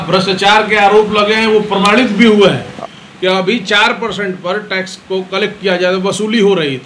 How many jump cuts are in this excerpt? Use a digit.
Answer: 1